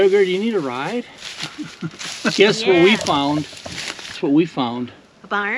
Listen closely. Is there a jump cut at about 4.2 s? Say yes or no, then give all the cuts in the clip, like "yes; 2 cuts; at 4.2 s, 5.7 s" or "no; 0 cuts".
yes; 1 cut; at 4.2 s